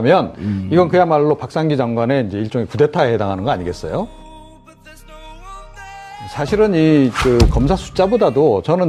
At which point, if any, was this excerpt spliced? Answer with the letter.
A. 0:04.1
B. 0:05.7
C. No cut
A